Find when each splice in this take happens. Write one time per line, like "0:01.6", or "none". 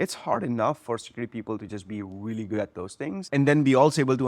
0:03.2